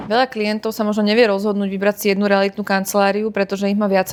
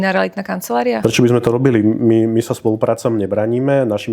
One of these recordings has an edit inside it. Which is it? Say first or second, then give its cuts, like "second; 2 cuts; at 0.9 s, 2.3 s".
second; 1 cut; at 1.0 s